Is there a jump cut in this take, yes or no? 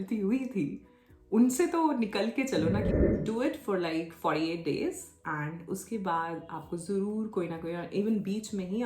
yes